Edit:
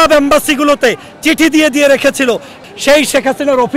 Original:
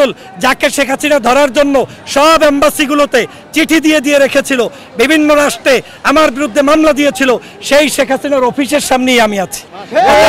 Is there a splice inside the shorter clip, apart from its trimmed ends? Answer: yes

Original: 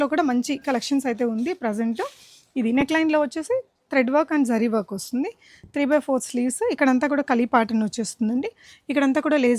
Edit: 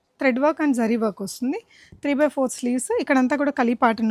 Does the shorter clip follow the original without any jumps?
yes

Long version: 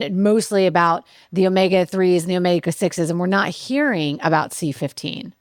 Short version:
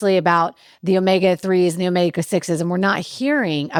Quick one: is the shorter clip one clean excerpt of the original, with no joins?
yes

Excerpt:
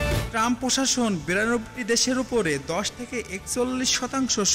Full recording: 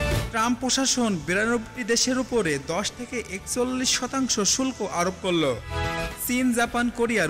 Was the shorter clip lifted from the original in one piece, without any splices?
yes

